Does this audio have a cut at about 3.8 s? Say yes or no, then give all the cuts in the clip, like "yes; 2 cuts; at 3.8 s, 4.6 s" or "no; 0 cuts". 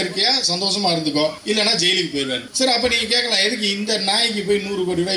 no; 2 cuts; at 1.4 s, 2.5 s